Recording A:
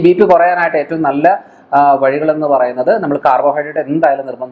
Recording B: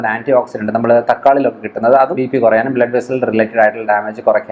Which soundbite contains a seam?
B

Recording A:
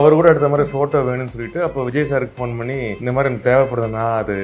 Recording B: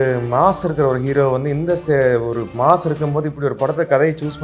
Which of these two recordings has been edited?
A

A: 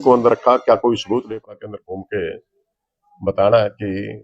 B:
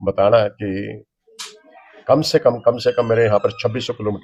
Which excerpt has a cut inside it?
A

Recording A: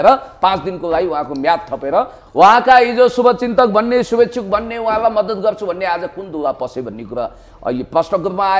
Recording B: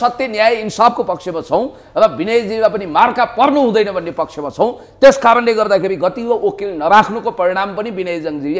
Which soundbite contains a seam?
A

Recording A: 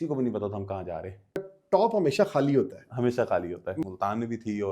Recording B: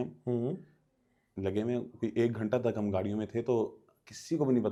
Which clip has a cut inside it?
A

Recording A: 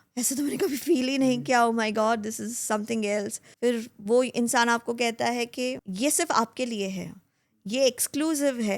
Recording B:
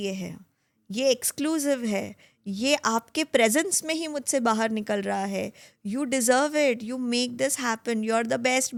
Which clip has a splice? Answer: A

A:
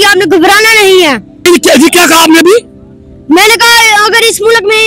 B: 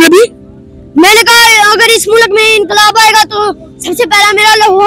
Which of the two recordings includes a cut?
A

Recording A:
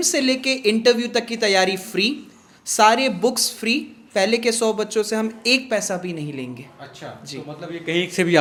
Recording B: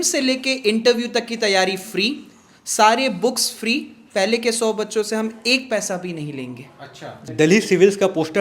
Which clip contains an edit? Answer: B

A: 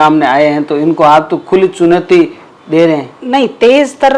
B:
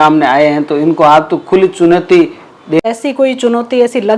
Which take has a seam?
B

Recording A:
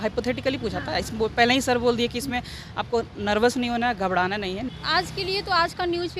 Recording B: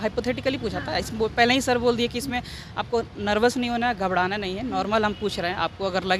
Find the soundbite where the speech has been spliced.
A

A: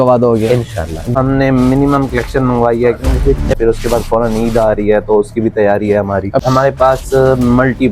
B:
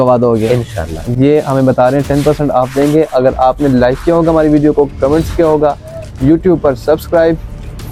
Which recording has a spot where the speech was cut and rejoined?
A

